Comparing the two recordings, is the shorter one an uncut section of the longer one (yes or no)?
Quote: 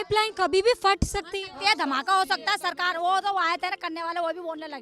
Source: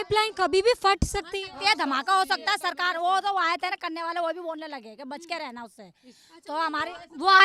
yes